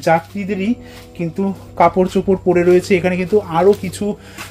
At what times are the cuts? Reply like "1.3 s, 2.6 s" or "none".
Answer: none